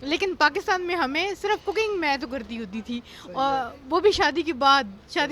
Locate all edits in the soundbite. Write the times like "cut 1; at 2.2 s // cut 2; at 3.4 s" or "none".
none